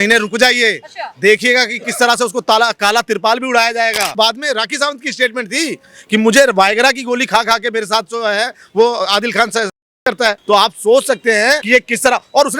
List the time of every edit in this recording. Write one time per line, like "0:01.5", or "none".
0:04.1
0:10.4
0:11.6